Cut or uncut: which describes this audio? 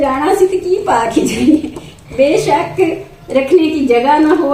uncut